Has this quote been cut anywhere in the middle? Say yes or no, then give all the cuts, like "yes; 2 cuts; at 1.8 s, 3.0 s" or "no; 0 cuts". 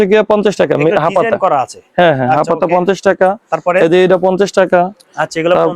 no; 0 cuts